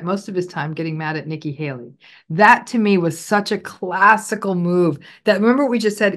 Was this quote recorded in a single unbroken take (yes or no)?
yes